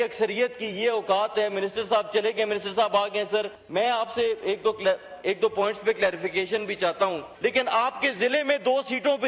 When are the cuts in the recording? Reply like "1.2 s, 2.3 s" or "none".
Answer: 3.6 s, 7.3 s